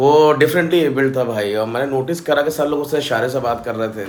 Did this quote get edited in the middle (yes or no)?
no